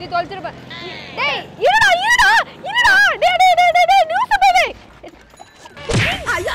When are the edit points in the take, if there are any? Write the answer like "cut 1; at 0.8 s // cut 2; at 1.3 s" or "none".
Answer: cut 1; at 4.7 s